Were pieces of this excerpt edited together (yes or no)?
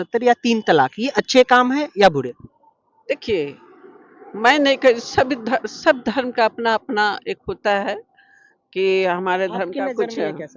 no